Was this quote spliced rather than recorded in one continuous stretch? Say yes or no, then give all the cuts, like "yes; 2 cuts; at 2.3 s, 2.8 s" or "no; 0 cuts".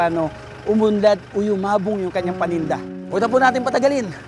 yes; 1 cut; at 2.9 s